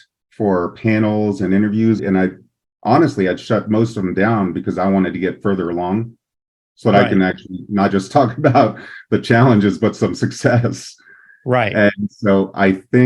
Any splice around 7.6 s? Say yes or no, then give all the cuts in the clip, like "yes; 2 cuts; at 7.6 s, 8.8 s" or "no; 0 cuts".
no; 1 cut; at 2.0 s